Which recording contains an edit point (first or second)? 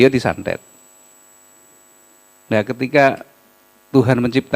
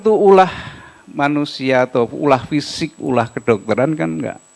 first